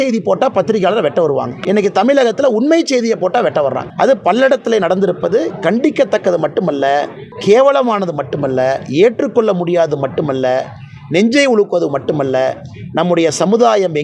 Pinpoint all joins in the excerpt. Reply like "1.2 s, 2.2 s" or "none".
1.5 s, 3.8 s, 7.2 s